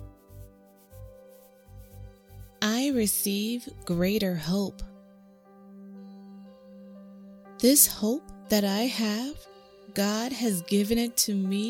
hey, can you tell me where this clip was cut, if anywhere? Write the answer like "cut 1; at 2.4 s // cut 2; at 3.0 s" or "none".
cut 1; at 2.2 s // cut 2; at 5.0 s // cut 3; at 6.9 s